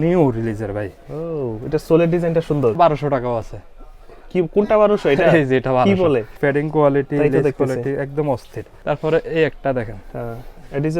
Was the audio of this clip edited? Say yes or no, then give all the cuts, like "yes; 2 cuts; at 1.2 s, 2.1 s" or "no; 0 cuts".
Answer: yes; 3 cuts; at 2.8 s, 6.3 s, 8.6 s